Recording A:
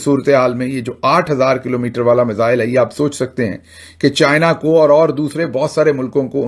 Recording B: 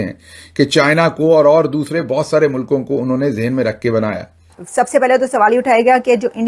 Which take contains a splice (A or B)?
B